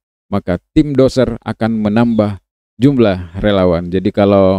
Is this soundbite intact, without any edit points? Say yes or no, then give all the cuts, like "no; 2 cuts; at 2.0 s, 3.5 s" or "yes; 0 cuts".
no; 1 cut; at 2.5 s